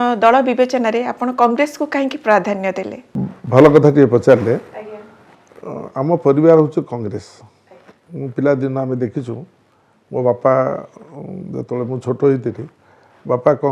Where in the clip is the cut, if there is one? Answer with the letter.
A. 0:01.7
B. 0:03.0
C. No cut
C